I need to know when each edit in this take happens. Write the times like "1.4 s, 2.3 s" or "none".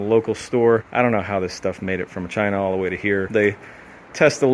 0.9 s, 3.3 s